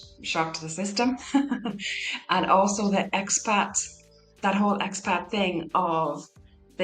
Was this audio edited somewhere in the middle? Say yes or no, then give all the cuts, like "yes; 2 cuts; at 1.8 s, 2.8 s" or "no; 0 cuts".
no; 0 cuts